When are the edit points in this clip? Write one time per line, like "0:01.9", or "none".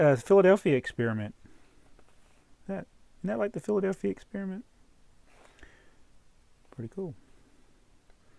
none